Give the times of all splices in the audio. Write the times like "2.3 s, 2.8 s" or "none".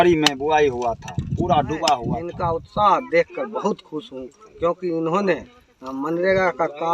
2.3 s